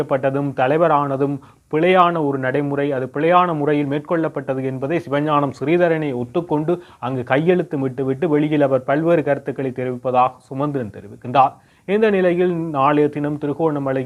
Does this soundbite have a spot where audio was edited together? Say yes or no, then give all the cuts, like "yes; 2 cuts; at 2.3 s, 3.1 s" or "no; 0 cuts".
no; 0 cuts